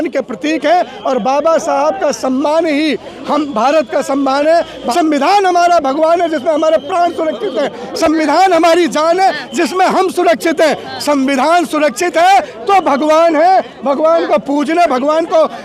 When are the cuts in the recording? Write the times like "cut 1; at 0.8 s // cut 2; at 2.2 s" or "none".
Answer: cut 1; at 4.8 s